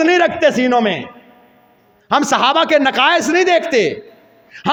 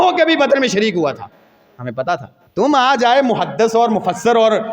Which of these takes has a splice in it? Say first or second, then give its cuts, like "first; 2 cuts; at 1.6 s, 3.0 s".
second; 1 cut; at 2.4 s